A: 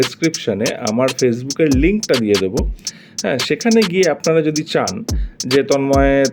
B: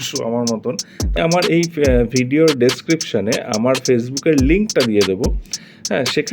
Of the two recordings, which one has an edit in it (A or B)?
B